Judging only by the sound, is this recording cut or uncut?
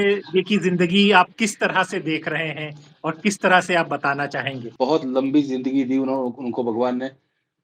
cut